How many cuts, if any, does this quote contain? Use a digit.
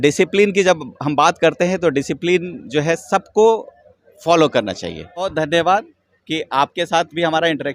1